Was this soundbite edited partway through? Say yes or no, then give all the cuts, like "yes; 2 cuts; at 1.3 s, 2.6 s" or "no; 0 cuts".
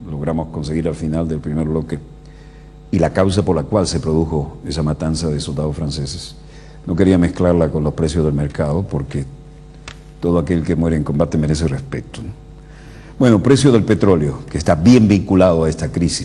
no; 0 cuts